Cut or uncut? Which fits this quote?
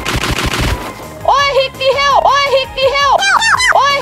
uncut